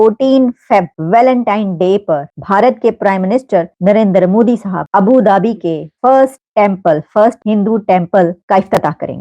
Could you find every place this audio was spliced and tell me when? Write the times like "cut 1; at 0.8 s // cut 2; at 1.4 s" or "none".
cut 1; at 1.0 s // cut 2; at 2.3 s // cut 3; at 3.7 s // cut 4; at 4.8 s // cut 5; at 5.9 s // cut 6; at 6.4 s // cut 7; at 7.4 s // cut 8; at 8.4 s